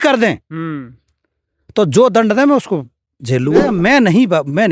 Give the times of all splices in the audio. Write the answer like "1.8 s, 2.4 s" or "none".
3.7 s